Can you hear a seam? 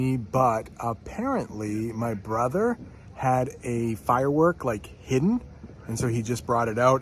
no; 0 cuts

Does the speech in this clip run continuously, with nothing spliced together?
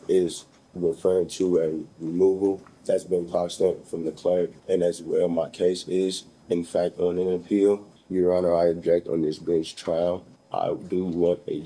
no; 4 cuts; at 2.7 s, 4.6 s, 7.9 s, 10.3 s

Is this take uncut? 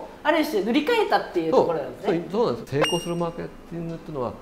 no; 1 cut; at 2.7 s

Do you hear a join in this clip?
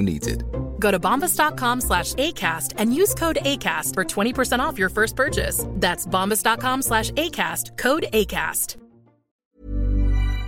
yes; 1 cut; at 9.3 s

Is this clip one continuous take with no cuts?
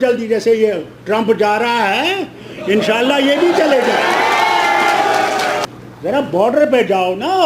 no; 1 cut; at 5.7 s

